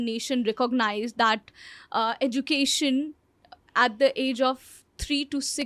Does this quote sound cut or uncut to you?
uncut